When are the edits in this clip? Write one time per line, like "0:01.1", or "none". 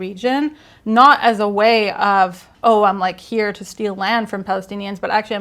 0:02.5